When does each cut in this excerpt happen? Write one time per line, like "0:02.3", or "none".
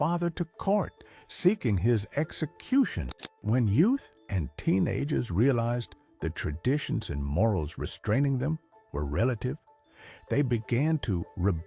0:03.4